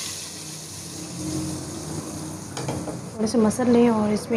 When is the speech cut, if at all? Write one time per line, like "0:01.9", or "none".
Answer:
0:03.1